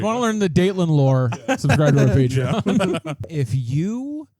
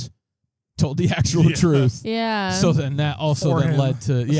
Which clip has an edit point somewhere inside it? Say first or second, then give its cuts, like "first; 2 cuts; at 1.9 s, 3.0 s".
first; 1 cut; at 3.2 s